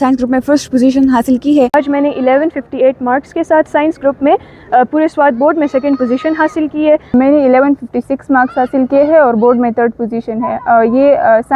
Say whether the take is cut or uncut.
cut